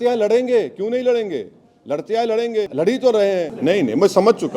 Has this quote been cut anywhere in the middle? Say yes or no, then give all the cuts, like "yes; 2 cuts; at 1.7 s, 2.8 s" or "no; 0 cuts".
yes; 2 cuts; at 2.7 s, 3.5 s